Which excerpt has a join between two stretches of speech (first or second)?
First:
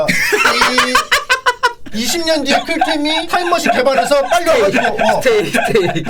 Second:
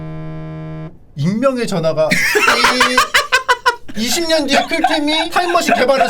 second